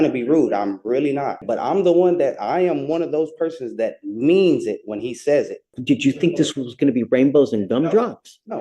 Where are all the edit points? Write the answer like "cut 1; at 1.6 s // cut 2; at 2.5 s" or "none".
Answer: cut 1; at 1.4 s // cut 2; at 5.7 s